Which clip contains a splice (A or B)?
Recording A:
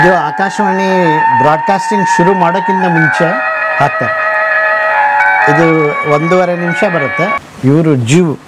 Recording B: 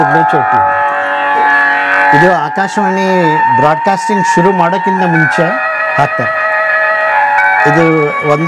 A